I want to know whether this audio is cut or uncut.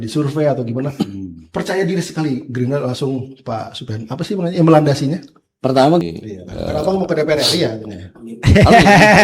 cut